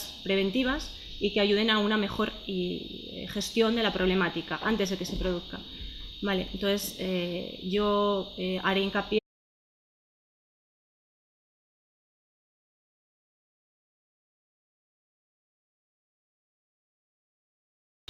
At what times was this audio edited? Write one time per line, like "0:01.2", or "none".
none